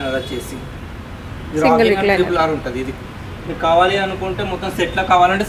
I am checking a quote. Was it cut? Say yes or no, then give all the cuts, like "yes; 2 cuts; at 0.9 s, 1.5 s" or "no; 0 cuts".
no; 0 cuts